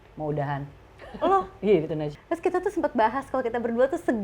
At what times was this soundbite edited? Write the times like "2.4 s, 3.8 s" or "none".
2.0 s

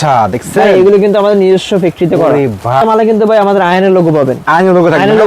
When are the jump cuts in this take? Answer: 2.8 s

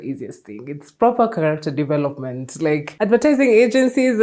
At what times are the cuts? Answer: 2.9 s

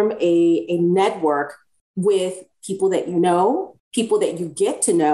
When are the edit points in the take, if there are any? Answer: 3.8 s

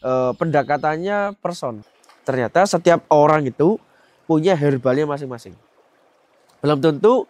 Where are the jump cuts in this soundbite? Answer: 1.9 s

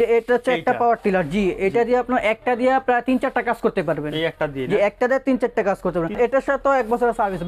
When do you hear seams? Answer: 6.1 s

